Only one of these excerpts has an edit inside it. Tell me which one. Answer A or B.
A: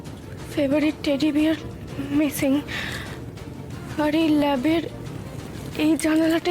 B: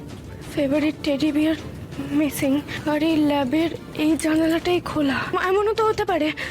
B